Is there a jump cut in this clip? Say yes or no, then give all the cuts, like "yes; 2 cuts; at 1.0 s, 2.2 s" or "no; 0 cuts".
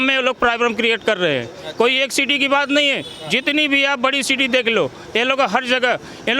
no; 0 cuts